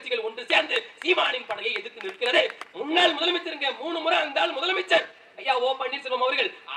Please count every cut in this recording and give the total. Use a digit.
1